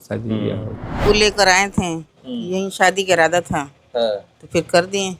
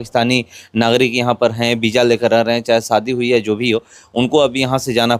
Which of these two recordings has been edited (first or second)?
first